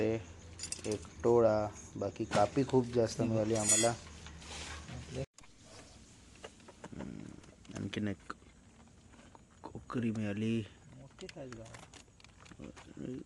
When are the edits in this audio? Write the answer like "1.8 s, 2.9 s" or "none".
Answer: 5.4 s